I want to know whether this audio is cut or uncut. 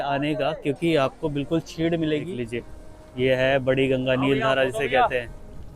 cut